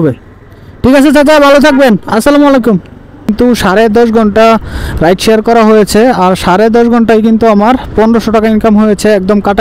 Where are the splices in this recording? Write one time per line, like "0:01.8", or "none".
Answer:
0:03.3